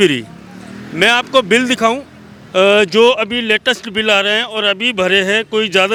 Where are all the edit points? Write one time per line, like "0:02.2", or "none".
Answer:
none